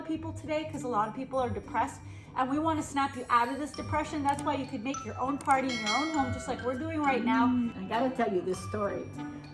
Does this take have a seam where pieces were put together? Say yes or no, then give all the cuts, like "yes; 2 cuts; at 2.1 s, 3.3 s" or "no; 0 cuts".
yes; 1 cut; at 7.8 s